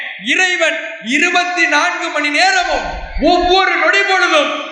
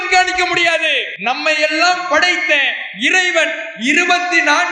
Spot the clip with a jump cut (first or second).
second